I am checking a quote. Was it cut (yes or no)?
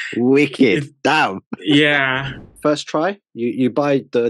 yes